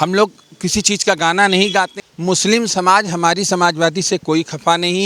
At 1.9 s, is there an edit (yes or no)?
yes